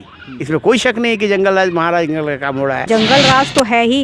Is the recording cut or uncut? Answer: cut